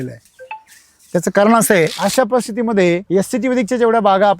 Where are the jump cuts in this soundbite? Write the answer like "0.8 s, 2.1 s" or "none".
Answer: 1.9 s, 3.0 s